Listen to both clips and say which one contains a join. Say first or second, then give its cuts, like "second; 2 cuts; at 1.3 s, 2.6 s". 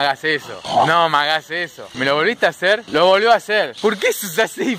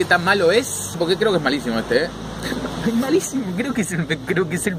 first; 2 cuts; at 2.8 s, 3.7 s